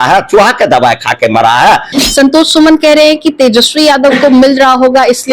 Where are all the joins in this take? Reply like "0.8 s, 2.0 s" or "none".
1.9 s